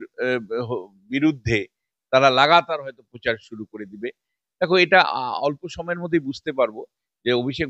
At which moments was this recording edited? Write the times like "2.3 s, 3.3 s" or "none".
none